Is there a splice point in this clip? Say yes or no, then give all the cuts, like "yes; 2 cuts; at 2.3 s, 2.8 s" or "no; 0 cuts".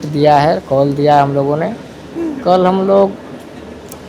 no; 0 cuts